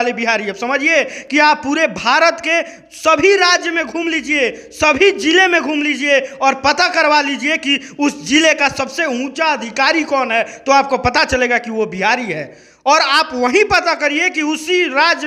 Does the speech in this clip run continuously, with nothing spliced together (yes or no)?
yes